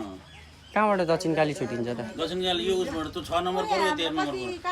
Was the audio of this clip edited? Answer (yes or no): no